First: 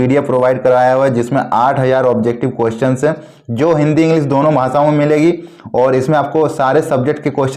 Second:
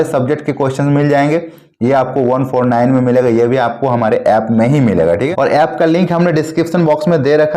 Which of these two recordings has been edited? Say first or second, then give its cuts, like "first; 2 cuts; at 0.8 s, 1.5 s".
second; 1 cut; at 5.3 s